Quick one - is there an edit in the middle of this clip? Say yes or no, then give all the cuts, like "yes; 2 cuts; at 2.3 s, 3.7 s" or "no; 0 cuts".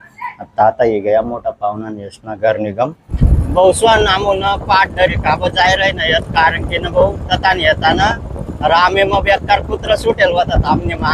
yes; 1 cut; at 3.0 s